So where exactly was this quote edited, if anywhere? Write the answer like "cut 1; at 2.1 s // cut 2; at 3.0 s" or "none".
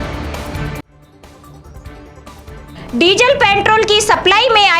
cut 1; at 2.2 s